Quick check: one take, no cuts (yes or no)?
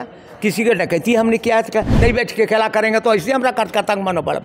no